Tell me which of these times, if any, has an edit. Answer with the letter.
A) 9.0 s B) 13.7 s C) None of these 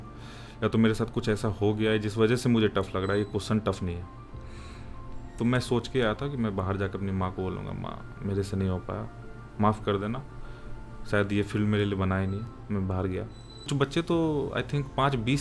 B